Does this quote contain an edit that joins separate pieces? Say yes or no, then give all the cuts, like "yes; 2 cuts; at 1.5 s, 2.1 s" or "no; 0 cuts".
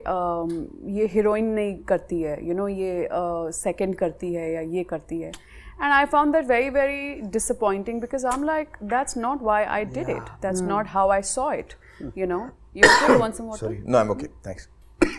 no; 0 cuts